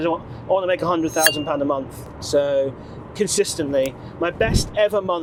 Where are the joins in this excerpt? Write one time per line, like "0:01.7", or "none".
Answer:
none

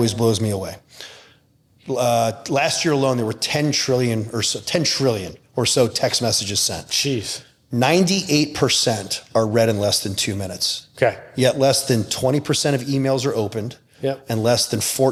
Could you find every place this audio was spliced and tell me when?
none

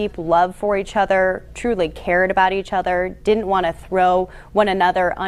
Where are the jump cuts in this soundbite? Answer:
none

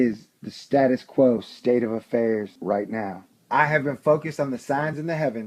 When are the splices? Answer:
0:02.9

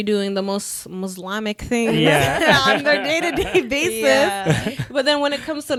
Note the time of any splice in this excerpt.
none

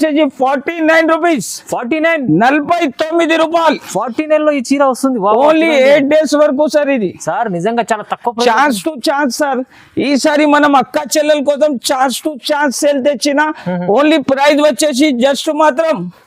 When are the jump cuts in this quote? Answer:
none

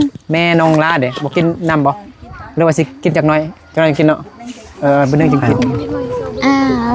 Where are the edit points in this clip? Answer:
none

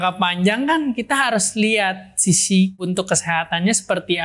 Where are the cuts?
0:02.8

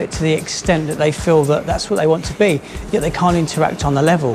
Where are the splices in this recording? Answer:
none

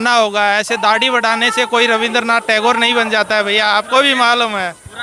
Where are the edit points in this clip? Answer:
none

